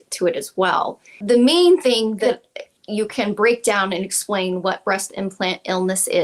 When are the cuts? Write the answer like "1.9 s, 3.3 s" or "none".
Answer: 1.2 s, 2.2 s